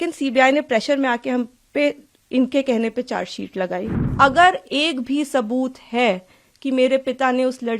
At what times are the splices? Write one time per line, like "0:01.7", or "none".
0:04.0

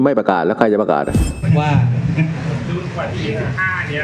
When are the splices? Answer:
0:01.4

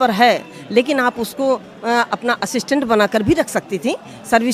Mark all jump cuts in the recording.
none

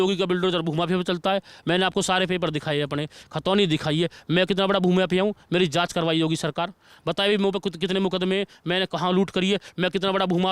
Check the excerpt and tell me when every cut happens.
none

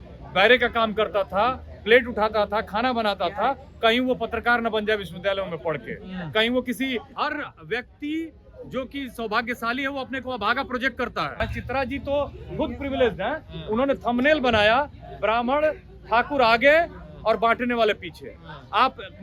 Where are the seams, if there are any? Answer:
0:07.1
0:11.4

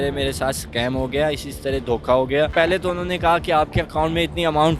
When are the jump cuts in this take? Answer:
0:02.5

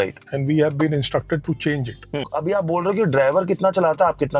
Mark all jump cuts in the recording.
0:02.3

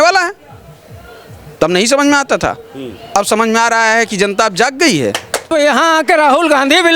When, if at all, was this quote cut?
0:05.5

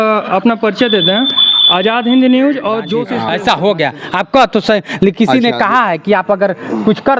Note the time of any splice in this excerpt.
0:03.0

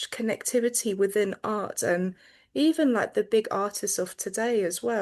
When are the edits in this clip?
none

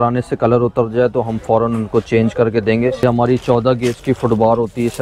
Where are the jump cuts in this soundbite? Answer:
0:03.0

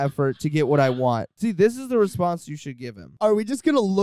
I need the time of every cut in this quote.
0:01.3
0:03.1

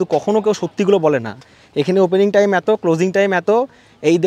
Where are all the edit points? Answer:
none

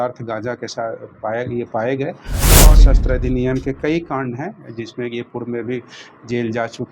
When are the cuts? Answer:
0:02.7

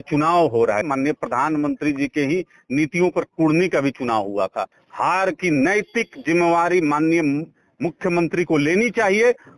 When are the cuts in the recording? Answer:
0:00.9
0:04.8

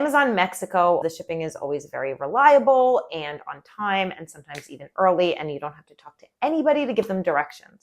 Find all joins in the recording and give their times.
0:01.0

